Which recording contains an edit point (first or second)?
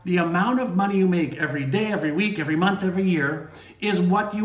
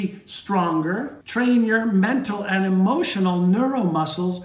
second